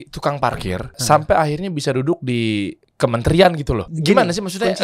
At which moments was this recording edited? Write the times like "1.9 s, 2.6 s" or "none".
1.0 s, 2.8 s, 3.9 s